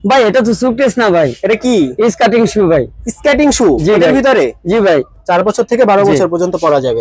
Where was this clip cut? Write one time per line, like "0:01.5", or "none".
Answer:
0:05.2